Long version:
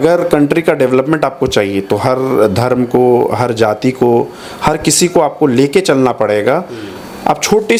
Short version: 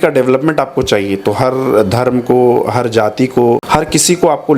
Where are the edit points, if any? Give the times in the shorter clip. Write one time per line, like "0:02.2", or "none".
0:03.6